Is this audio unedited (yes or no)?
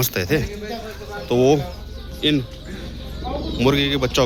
yes